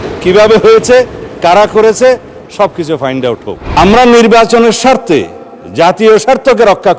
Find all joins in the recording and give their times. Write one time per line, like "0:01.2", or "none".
0:03.8